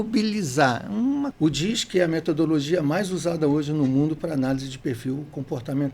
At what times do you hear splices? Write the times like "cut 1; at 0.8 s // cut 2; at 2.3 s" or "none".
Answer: cut 1; at 1.3 s

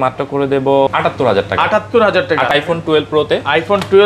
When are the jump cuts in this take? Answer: cut 1; at 0.9 s // cut 2; at 2.5 s

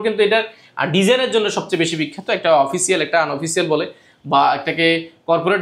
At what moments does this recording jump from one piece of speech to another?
none

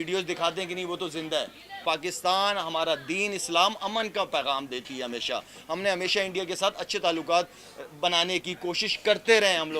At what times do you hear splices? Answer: cut 1; at 1.8 s

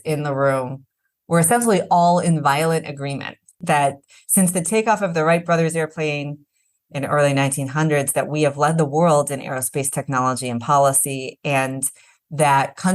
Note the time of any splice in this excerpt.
cut 1; at 3.6 s

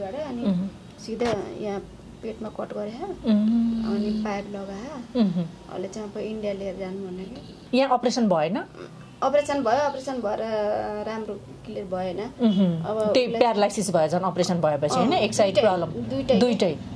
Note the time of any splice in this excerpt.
cut 1; at 7.5 s

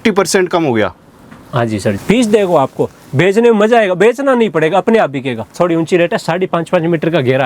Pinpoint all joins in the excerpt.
cut 1; at 2.0 s // cut 2; at 5.5 s

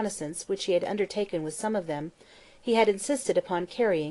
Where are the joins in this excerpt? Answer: cut 1; at 2.3 s

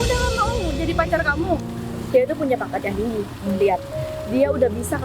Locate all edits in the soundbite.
cut 1; at 2.0 s

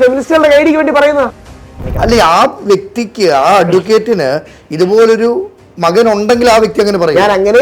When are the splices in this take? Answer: cut 1; at 1.4 s

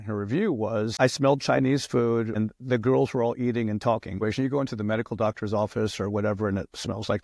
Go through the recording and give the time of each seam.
cut 1; at 0.9 s // cut 2; at 2.4 s // cut 3; at 4.2 s

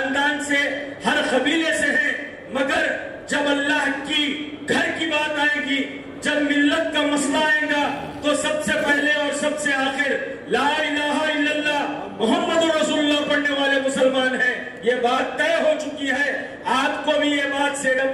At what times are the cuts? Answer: none

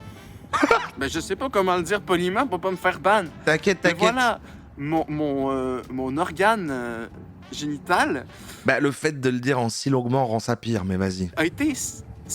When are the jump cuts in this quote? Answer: cut 1; at 11.2 s

